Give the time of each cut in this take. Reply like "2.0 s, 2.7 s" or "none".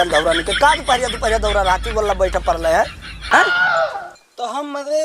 3.3 s